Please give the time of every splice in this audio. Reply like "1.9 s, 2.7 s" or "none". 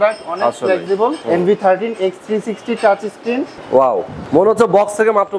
1.2 s, 3.6 s, 4.2 s